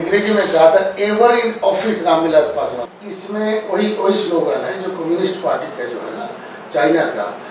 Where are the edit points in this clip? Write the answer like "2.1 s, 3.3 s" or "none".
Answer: 2.9 s